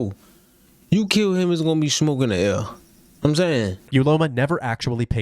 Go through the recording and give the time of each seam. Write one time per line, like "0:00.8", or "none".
0:03.8

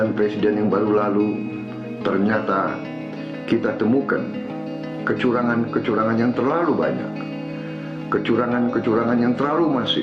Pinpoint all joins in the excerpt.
none

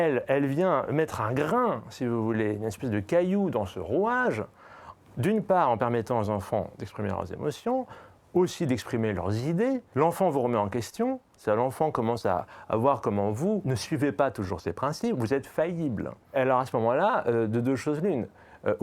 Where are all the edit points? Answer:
0:09.9
0:13.7
0:16.3

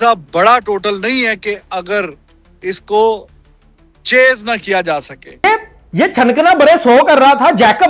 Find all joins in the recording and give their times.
0:05.4

